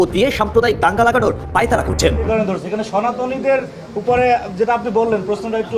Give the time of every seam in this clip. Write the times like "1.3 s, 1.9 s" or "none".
2.2 s